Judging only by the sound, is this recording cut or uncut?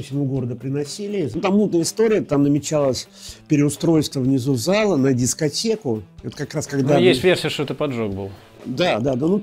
cut